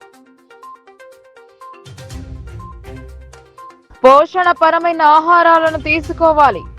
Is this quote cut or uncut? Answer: cut